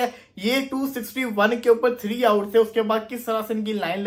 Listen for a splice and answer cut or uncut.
uncut